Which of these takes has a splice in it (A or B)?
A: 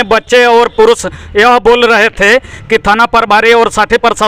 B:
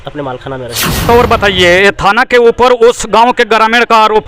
B